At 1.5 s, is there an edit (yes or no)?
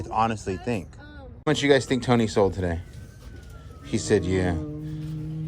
yes